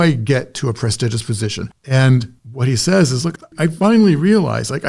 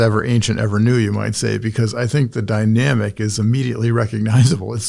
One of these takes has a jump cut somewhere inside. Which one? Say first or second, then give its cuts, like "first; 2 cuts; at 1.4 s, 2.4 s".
first; 2 cuts; at 1.9 s, 3.5 s